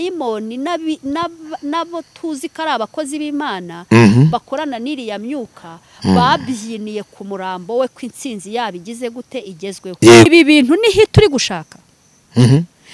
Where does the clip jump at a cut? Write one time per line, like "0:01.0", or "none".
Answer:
0:10.3